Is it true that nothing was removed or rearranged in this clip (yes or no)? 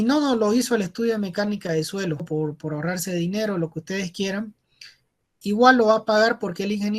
no